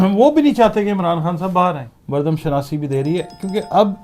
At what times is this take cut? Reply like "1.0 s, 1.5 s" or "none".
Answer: 1.9 s